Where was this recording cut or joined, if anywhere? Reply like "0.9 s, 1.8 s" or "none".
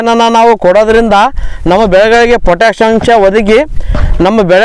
none